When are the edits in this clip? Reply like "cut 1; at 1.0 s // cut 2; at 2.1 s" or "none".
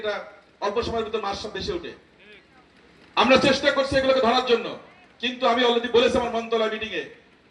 none